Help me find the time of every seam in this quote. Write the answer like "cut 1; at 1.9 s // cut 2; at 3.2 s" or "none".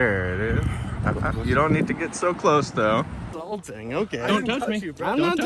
cut 1; at 3.3 s